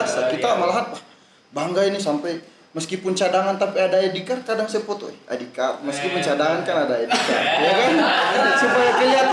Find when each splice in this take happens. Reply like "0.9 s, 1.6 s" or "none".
none